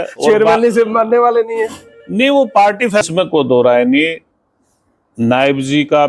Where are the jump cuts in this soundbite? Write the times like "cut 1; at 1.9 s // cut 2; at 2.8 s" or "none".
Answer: cut 1; at 3.0 s